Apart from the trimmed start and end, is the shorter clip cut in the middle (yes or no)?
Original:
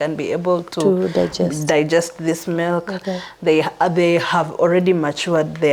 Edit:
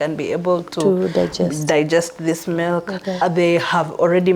yes